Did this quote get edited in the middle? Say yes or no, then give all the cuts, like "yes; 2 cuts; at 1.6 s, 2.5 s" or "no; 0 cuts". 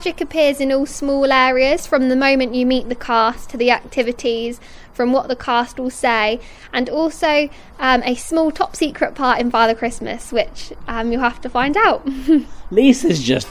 no; 0 cuts